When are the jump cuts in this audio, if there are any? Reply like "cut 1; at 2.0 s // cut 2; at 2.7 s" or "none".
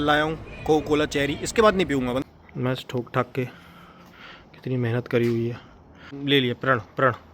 cut 1; at 2.2 s // cut 2; at 6.1 s